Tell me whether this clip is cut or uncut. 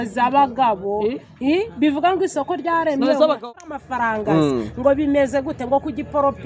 cut